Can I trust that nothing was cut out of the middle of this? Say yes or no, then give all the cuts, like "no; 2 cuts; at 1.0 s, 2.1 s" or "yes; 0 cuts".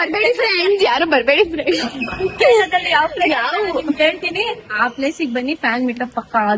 no; 1 cut; at 2.7 s